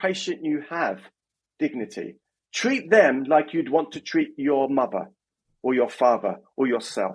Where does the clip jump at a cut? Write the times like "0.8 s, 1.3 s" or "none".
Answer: none